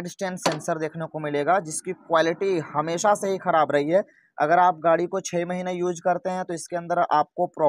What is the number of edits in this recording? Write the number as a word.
zero